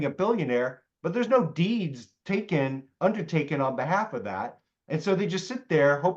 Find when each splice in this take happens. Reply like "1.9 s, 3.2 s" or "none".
none